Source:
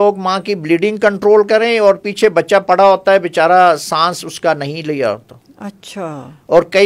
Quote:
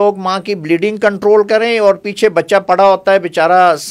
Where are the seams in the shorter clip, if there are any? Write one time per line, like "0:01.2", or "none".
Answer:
none